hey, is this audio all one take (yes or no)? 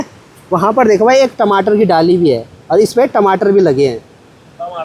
yes